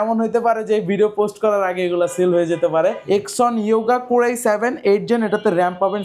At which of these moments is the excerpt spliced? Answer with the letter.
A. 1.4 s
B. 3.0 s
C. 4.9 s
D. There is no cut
B